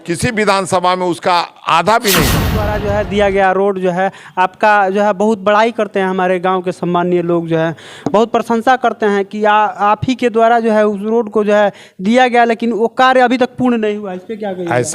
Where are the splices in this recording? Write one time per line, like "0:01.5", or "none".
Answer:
0:02.7